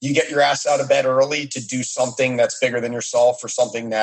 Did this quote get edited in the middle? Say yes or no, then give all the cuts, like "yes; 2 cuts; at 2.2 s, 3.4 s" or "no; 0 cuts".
no; 0 cuts